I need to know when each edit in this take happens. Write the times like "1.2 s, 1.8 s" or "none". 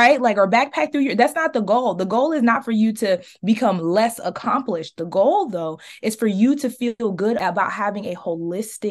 7.4 s